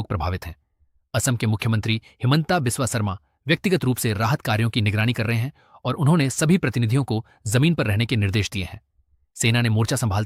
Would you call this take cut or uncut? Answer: uncut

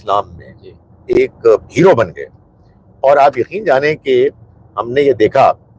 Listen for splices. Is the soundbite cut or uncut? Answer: uncut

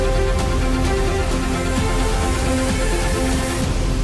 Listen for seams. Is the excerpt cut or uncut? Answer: uncut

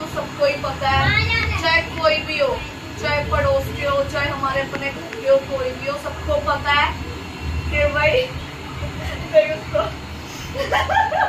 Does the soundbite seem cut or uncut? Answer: uncut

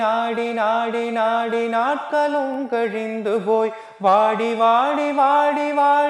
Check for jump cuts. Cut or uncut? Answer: uncut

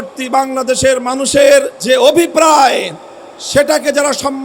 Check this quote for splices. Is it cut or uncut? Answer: cut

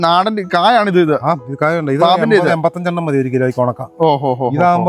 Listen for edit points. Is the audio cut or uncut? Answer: uncut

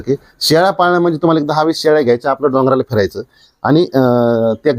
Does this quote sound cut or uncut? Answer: uncut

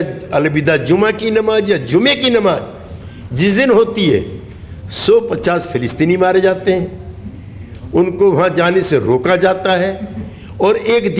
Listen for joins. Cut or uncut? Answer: uncut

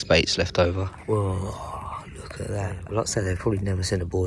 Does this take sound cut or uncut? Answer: cut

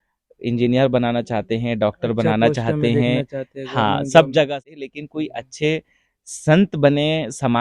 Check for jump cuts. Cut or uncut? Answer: cut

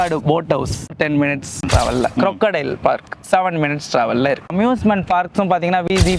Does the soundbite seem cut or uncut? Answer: cut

